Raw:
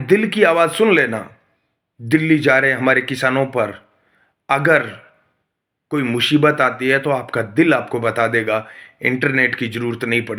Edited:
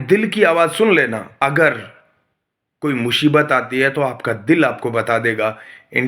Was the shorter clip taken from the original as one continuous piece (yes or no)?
no